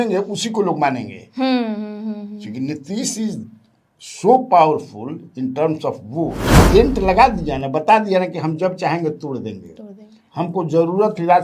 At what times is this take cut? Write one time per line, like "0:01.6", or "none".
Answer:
0:06.5